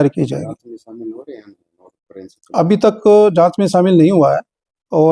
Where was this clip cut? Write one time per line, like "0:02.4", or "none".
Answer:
none